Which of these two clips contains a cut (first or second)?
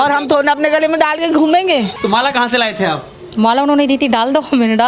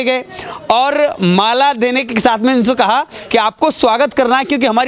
first